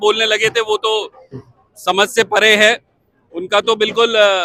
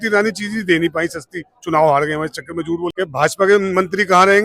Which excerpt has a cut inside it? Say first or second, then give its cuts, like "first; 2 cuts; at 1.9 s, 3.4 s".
second; 1 cut; at 2.9 s